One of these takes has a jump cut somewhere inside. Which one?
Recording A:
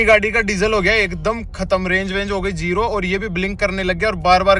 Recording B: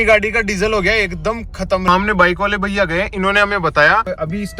B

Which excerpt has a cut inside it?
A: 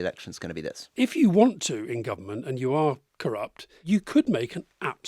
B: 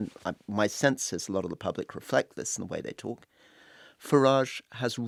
A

